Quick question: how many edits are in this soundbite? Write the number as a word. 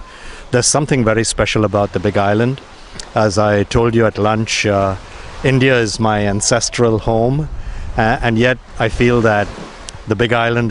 one